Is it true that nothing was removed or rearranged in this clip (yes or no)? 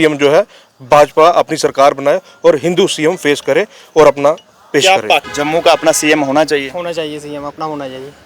no